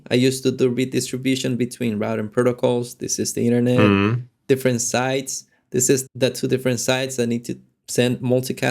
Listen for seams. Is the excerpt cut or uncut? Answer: cut